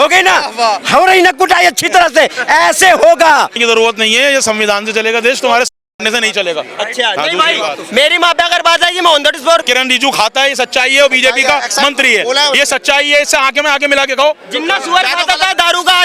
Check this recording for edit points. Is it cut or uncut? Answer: cut